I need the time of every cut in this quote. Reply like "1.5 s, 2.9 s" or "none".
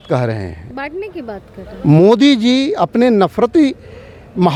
none